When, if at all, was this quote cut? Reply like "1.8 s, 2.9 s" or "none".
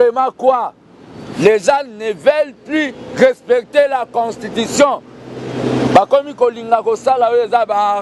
none